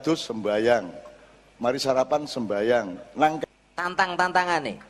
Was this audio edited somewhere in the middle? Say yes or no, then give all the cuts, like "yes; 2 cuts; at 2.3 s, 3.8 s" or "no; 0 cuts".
yes; 1 cut; at 3.4 s